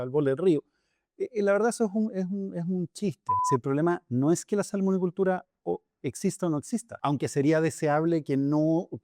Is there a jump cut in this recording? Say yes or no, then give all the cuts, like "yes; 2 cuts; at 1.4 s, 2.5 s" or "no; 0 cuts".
yes; 2 cuts; at 3.3 s, 6.9 s